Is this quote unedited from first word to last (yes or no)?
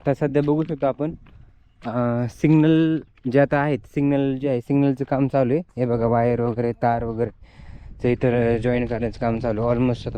yes